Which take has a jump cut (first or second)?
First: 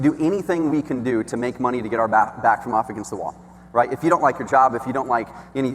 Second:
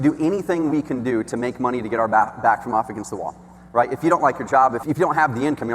second